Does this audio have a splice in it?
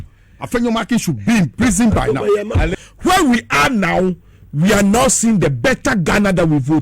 yes; 1 cut; at 2.7 s

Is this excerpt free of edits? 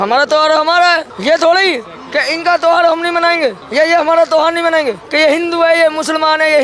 no; 3 cuts; at 1.1 s, 3.6 s, 5.0 s

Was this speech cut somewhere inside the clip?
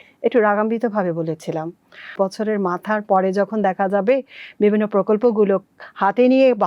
yes; 1 cut; at 2.1 s

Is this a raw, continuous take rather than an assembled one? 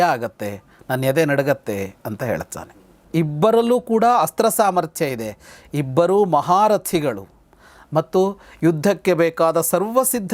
no; 1 cut; at 2.9 s

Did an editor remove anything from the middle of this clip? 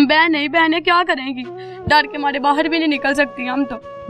no; 0 cuts

